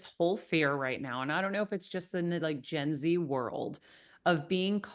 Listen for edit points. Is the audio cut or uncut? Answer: uncut